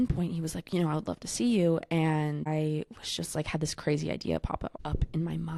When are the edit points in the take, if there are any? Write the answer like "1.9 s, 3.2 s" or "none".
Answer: none